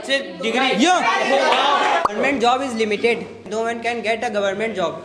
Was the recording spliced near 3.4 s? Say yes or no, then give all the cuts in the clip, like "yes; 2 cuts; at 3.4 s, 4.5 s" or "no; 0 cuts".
yes; 2 cuts; at 2.1 s, 3.4 s